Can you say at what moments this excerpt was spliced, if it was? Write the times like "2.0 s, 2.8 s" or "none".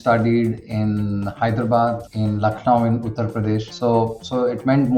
2.1 s, 3.7 s